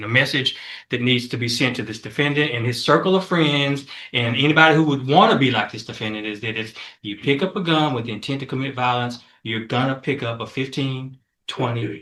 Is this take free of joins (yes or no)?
yes